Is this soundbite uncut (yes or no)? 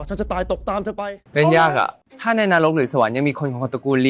no